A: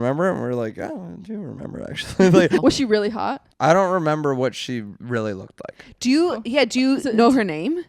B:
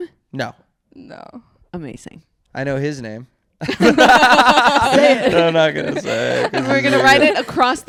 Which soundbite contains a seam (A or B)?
A